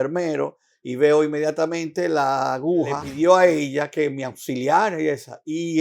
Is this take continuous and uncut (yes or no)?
no